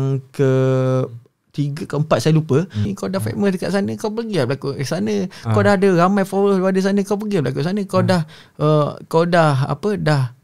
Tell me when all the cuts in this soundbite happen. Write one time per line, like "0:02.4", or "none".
0:02.8